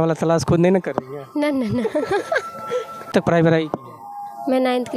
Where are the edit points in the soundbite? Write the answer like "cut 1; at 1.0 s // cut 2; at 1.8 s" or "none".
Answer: cut 1; at 3.1 s